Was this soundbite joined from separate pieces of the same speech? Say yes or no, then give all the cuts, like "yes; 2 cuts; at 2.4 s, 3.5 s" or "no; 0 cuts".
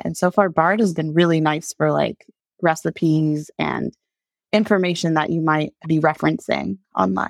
yes; 1 cut; at 5.8 s